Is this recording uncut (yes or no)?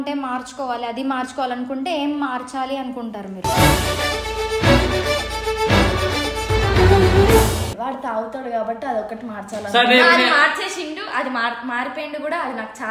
yes